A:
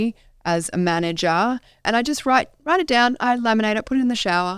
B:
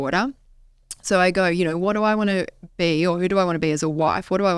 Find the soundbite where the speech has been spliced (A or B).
A